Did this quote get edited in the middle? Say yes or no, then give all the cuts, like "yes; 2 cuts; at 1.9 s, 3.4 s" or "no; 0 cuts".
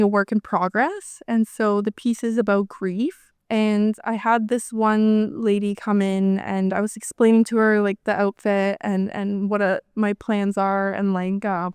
yes; 1 cut; at 3.3 s